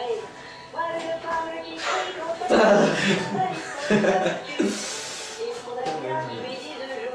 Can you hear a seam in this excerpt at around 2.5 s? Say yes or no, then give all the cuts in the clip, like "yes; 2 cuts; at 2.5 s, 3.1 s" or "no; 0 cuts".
yes; 1 cut; at 2.5 s